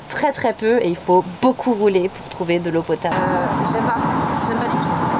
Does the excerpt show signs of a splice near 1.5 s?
no; 1 cut; at 3.1 s

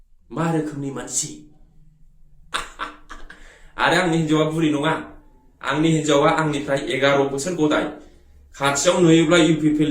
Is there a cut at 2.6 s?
yes; 1 cut; at 2.6 s

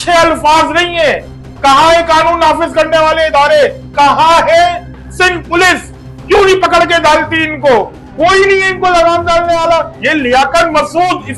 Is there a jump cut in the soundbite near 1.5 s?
no; 1 cut; at 8.0 s

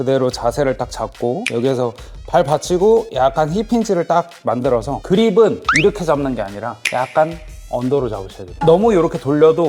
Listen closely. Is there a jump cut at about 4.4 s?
no; 0 cuts

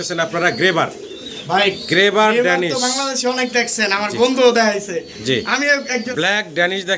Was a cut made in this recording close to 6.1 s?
yes; 1 cut; at 6.1 s

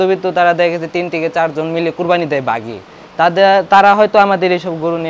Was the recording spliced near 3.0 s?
no; 0 cuts

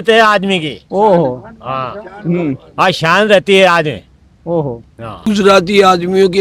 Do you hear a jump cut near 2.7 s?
no; 1 cut; at 5.2 s

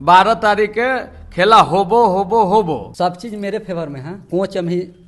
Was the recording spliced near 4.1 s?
yes; 2 cuts; at 2.9 s, 4.1 s

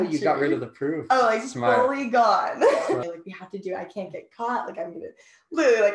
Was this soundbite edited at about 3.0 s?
yes; 1 cut; at 3.0 s

